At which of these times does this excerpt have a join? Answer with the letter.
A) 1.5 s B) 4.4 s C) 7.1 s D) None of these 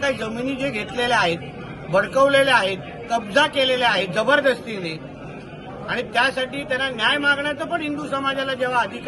D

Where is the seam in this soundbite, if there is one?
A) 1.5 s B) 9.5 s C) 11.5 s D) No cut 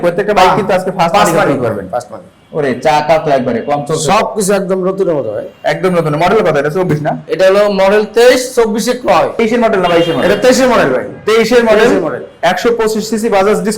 B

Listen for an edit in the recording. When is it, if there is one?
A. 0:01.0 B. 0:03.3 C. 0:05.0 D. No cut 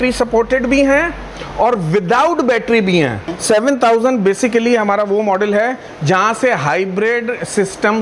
B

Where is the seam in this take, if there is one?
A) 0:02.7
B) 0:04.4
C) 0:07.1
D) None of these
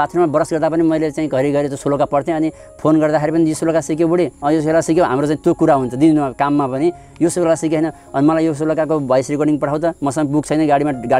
D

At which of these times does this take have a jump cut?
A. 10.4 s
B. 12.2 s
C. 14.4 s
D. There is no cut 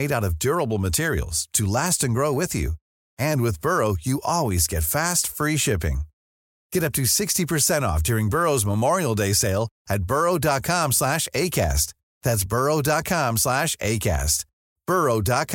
D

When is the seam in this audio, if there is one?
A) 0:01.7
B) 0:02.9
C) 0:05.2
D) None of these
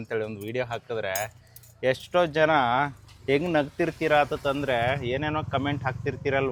D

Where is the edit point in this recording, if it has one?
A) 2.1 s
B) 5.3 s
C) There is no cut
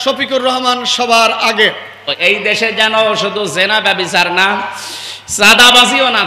A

